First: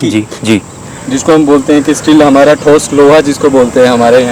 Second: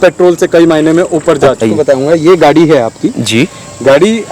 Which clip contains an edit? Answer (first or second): second